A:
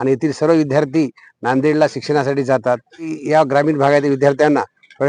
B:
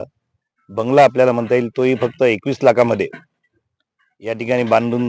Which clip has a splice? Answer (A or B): A